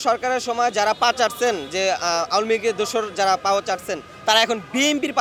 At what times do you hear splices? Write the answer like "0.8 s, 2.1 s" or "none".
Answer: none